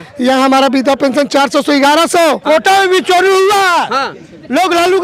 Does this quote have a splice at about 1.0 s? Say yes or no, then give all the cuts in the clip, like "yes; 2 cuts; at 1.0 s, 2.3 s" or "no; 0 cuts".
no; 1 cut; at 2.4 s